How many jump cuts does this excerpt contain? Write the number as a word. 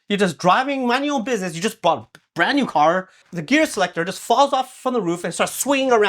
one